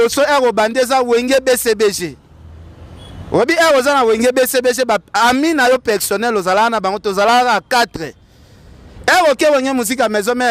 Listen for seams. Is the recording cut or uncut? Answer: uncut